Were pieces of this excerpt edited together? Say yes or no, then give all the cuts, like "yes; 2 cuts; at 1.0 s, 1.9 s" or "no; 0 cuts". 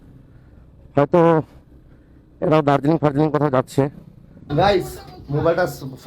yes; 1 cut; at 4.4 s